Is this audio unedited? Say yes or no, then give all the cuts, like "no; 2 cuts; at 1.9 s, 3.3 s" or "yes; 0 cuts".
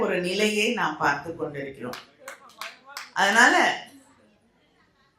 yes; 0 cuts